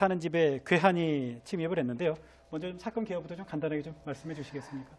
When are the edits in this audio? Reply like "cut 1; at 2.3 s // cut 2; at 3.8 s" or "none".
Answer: none